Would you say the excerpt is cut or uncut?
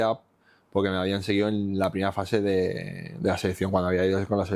uncut